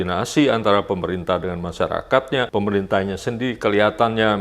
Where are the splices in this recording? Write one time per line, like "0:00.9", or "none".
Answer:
0:02.5